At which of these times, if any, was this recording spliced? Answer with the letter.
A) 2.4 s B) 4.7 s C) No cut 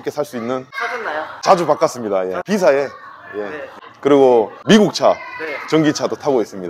A